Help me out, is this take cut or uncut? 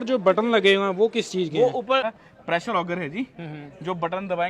cut